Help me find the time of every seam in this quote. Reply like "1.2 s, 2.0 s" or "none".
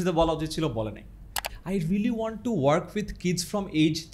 1.5 s